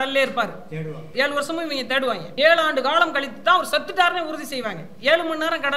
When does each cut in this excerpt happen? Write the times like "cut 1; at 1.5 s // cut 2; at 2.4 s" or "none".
cut 1; at 1.0 s // cut 2; at 2.3 s